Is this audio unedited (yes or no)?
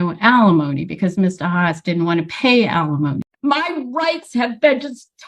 no